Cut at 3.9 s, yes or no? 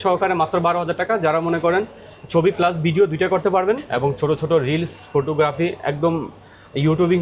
yes